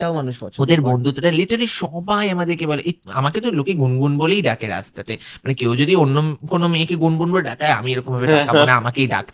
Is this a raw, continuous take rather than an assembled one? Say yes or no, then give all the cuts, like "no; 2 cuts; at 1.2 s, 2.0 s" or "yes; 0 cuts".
yes; 0 cuts